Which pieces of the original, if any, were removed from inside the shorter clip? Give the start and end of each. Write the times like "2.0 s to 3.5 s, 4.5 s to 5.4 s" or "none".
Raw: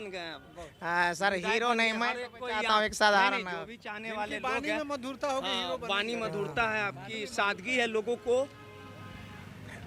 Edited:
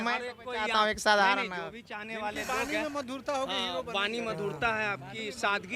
none